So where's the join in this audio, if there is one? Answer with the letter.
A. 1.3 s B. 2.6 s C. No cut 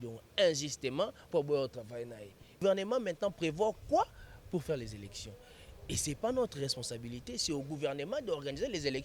B